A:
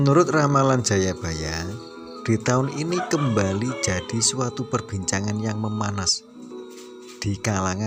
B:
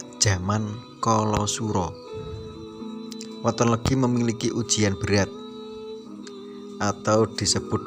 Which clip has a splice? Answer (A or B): B